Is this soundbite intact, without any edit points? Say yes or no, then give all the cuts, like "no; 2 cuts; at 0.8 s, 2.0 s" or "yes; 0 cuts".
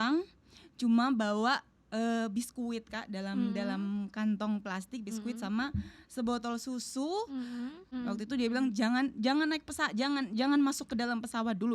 no; 1 cut; at 7.9 s